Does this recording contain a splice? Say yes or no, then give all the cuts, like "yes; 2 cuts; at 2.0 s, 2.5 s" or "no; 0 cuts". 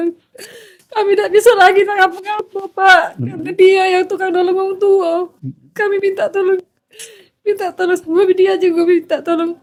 no; 0 cuts